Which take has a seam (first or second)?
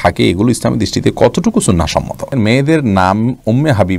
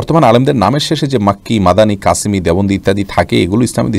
first